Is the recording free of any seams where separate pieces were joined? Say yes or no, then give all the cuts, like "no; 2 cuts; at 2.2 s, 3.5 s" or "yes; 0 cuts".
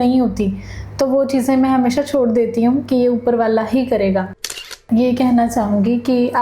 no; 1 cut; at 4.8 s